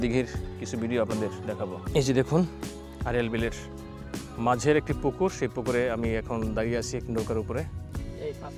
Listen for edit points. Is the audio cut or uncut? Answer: uncut